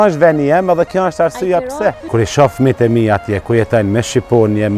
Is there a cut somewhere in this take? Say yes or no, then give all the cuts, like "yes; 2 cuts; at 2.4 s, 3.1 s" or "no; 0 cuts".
yes; 1 cut; at 2.1 s